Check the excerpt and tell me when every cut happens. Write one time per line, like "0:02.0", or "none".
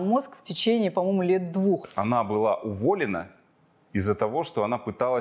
0:01.8